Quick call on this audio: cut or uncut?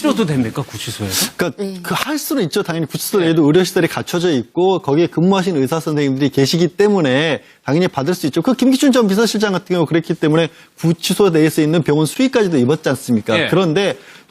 cut